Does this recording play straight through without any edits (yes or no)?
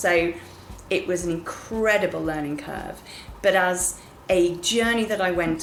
yes